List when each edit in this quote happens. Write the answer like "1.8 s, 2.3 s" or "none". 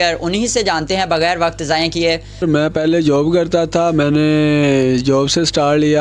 2.4 s